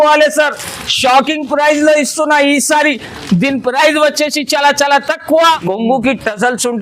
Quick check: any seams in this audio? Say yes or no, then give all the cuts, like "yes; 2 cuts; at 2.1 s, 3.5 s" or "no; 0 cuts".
yes; 1 cut; at 5.5 s